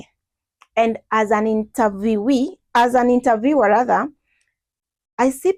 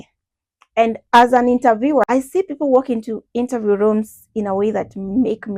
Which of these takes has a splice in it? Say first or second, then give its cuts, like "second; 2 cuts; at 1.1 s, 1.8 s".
second; 2 cuts; at 1.0 s, 2.0 s